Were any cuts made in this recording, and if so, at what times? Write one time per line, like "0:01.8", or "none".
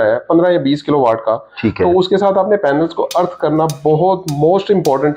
none